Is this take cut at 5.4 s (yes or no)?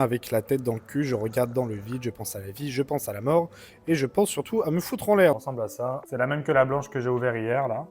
yes